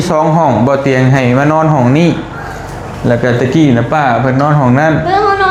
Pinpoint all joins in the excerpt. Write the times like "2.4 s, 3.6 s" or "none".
none

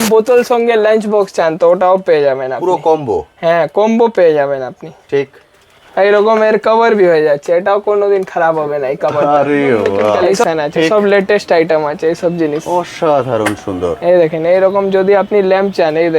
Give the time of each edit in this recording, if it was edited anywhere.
10.4 s

